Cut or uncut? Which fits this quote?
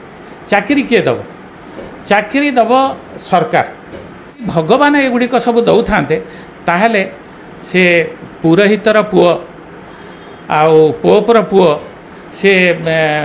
cut